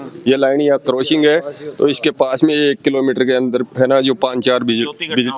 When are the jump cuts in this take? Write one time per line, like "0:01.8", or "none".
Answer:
none